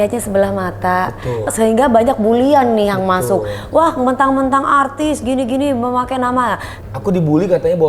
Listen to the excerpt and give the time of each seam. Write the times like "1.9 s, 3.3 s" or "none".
1.5 s, 6.7 s